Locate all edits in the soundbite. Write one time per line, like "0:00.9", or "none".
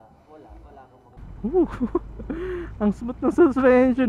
0:01.2